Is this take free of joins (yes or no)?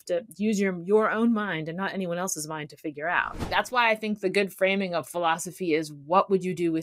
no